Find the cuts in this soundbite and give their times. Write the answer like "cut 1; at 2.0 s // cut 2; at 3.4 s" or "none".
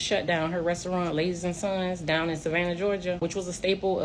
none